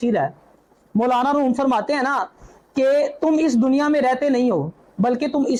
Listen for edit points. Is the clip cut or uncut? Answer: uncut